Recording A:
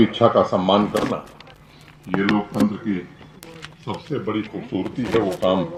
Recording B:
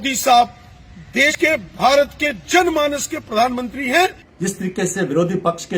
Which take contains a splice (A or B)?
B